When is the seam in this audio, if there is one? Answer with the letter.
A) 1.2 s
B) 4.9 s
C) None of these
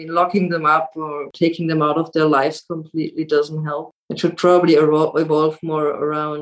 A